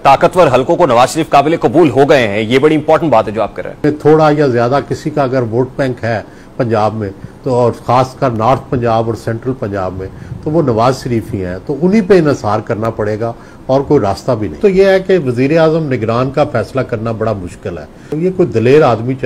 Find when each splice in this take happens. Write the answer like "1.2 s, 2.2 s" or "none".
3.8 s, 14.6 s